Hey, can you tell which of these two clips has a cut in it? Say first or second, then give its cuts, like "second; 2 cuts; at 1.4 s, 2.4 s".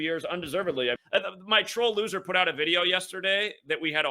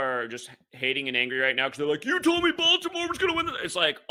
first; 1 cut; at 1.0 s